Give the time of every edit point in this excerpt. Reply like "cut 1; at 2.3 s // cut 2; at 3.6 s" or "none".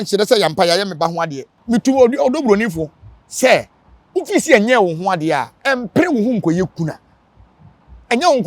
cut 1; at 1.5 s